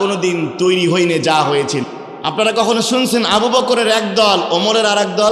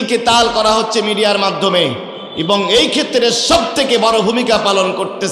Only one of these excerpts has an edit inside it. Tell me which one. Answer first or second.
first